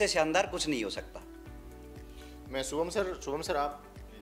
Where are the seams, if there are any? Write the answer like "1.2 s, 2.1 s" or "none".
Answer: none

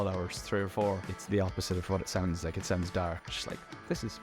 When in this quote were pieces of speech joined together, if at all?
1.2 s, 3.3 s

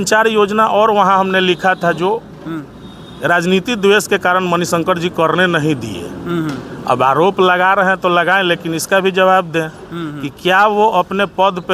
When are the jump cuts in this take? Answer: none

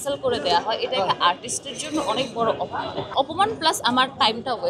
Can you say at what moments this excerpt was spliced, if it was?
3.1 s

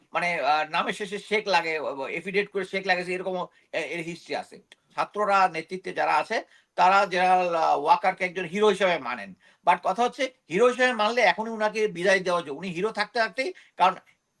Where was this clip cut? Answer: 4.9 s

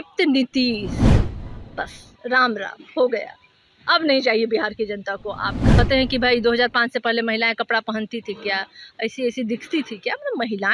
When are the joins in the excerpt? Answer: 5.8 s

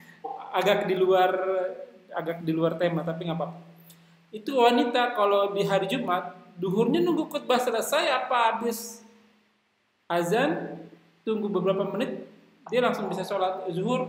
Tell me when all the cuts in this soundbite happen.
none

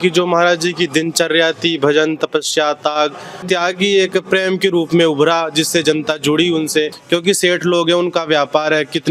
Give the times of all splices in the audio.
3.4 s, 7.0 s

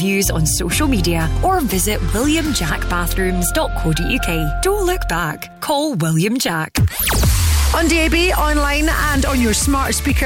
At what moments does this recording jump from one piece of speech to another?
6.7 s

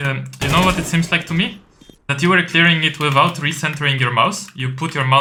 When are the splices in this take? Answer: none

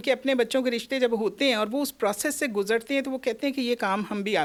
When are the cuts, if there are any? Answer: none

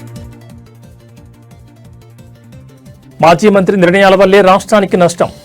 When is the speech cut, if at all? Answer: 2.1 s

